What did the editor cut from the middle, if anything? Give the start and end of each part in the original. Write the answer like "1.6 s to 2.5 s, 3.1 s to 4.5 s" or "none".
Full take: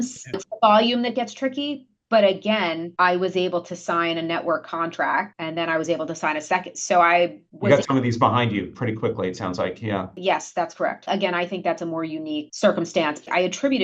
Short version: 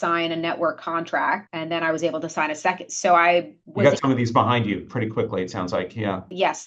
none

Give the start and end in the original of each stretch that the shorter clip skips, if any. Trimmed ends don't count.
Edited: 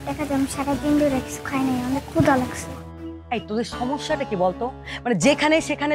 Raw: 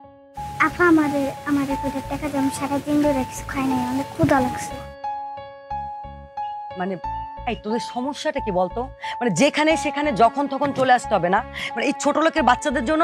5.0 s to 7.2 s

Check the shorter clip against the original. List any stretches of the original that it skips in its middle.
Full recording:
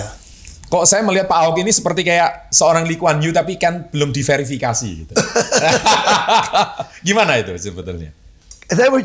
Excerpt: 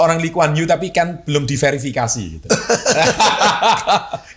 none

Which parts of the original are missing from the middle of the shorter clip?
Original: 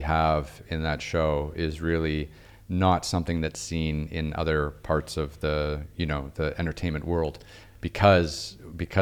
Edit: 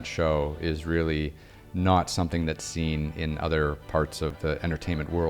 5.3 s to 6.3 s

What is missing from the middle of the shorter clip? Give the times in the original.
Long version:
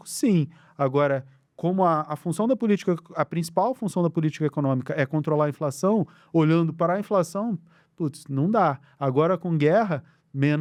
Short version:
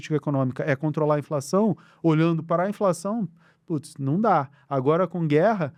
none

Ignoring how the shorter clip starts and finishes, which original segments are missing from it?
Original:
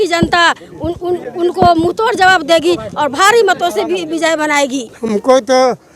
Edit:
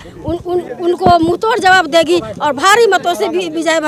none

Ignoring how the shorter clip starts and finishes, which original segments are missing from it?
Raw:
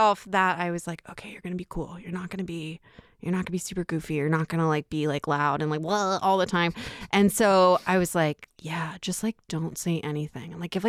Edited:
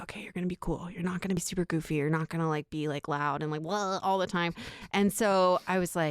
2.5 s to 3.6 s

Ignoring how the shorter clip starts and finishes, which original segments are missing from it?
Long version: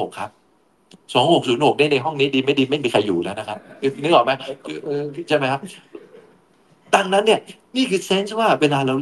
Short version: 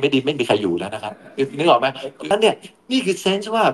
4.8 s to 7.2 s

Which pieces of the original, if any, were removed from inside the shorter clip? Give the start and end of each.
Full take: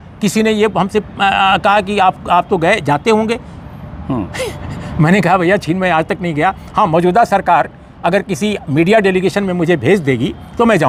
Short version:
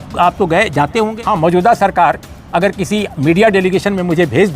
3.3 s to 6.7 s

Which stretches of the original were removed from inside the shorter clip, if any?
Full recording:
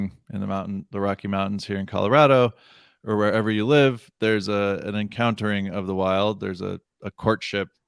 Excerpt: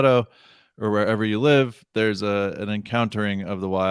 none

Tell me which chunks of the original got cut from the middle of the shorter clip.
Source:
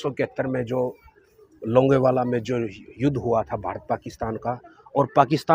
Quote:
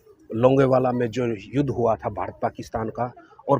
2.8 s to 2.9 s

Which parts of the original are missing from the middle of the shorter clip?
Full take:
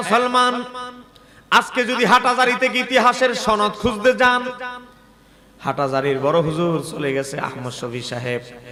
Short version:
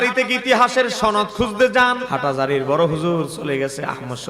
4.5 s to 5.6 s

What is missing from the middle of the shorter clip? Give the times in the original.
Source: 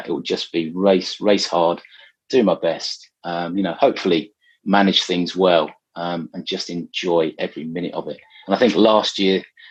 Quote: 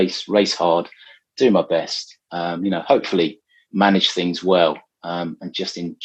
none

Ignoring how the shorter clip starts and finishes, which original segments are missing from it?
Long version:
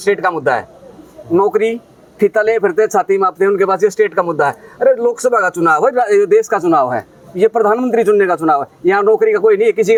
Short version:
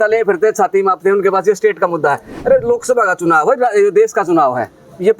none

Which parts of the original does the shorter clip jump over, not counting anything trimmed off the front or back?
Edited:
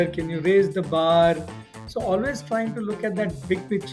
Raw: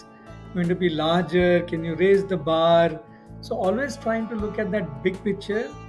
none

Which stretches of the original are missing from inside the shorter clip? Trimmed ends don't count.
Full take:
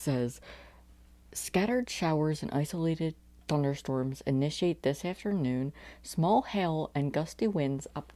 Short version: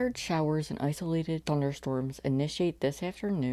3.1 s to 3.4 s

